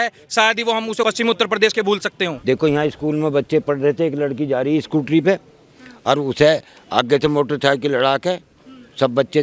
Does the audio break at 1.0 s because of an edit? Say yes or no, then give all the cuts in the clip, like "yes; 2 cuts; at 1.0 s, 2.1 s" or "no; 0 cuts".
yes; 2 cuts; at 1.0 s, 2.4 s